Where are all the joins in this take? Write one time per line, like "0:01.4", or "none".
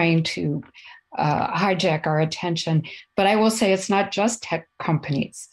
none